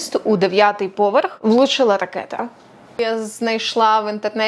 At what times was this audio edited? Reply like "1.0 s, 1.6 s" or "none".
1.4 s, 2.8 s